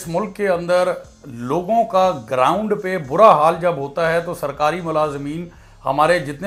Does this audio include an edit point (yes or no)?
no